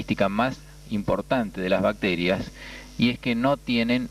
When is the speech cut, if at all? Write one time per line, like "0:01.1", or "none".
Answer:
none